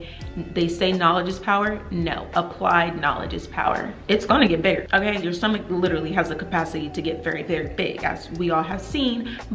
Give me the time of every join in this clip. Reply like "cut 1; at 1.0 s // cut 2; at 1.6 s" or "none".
cut 1; at 3.9 s // cut 2; at 4.8 s